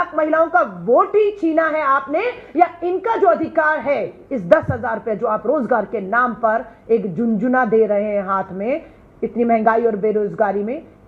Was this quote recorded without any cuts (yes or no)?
yes